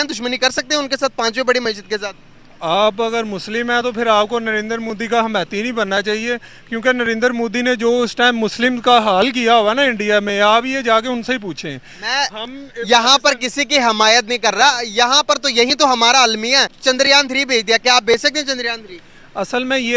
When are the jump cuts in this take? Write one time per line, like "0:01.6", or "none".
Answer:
0:14.8
0:16.7